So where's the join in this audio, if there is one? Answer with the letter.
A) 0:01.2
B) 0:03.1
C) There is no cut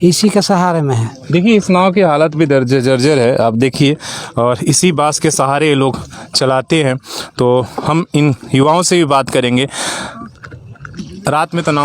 C